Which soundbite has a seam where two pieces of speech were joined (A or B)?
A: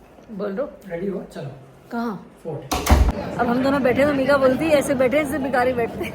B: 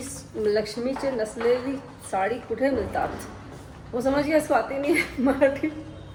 A